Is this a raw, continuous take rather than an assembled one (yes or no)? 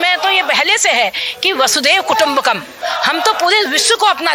yes